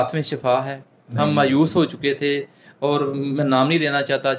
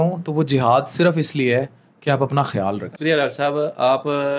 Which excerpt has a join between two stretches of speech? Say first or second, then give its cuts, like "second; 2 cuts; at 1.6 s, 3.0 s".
second; 1 cut; at 3.0 s